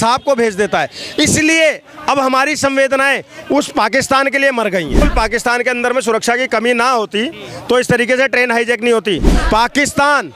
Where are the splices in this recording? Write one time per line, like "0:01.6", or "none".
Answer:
0:05.0
0:09.3